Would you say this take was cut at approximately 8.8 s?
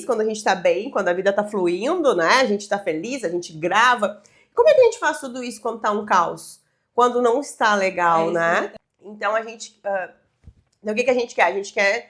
yes; 1 cut; at 8.8 s

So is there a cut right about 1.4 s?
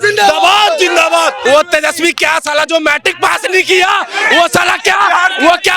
yes; 1 cut; at 1.4 s

